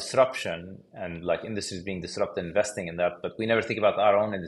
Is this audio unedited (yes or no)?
yes